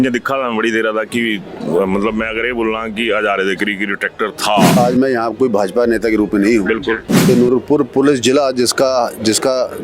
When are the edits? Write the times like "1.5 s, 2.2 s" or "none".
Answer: 4.8 s, 7.3 s

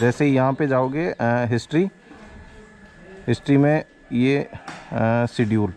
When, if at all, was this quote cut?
none

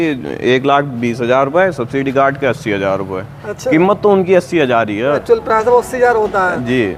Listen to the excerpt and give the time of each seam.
none

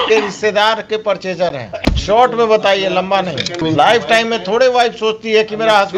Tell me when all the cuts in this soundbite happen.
1.7 s, 3.6 s

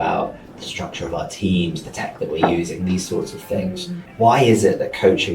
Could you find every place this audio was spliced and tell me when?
4.1 s

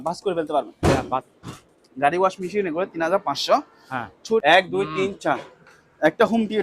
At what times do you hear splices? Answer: 1.2 s, 4.4 s

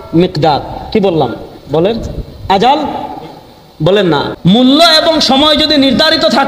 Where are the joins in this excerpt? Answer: 4.3 s

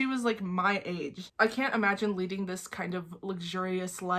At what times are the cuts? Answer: 1.2 s

